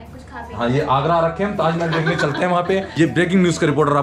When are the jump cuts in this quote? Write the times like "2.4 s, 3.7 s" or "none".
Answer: 2.9 s